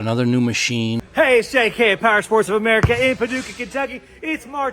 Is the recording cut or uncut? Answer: cut